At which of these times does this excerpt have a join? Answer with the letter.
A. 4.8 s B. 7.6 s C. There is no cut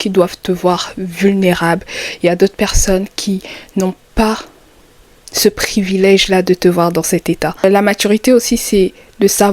B